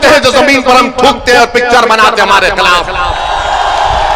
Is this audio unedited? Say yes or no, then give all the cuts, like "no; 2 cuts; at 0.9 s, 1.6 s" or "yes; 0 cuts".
yes; 0 cuts